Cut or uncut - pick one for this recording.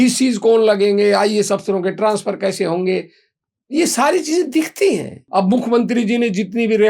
cut